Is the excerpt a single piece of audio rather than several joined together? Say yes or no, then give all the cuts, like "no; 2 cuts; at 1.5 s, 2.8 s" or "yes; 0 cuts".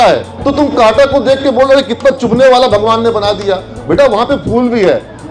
yes; 0 cuts